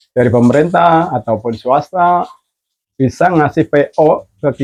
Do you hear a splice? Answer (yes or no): no